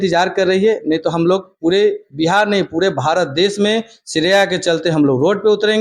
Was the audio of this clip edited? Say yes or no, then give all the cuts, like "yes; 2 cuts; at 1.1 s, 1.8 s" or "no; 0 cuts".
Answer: no; 0 cuts